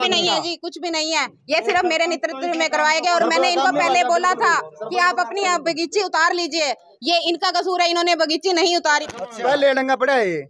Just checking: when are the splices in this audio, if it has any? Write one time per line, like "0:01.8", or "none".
0:09.0